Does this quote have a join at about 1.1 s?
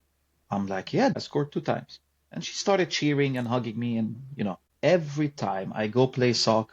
yes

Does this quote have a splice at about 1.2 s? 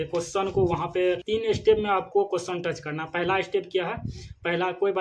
yes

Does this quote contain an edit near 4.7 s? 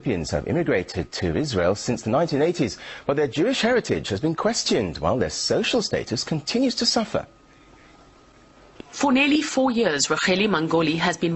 yes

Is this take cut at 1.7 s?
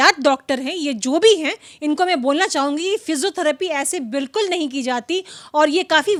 no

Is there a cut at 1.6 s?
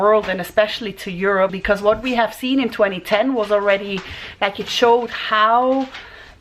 yes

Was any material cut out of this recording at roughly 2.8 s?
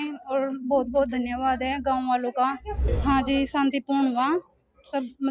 yes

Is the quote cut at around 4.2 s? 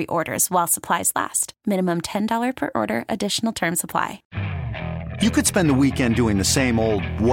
yes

